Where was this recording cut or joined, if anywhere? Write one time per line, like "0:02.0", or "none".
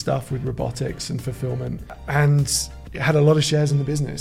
0:02.0